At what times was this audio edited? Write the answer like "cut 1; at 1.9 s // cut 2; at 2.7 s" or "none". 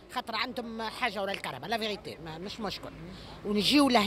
none